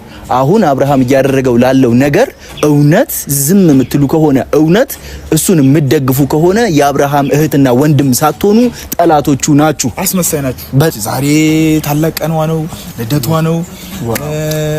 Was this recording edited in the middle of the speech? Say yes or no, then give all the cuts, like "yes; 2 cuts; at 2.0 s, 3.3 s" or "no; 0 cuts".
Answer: yes; 1 cut; at 11.0 s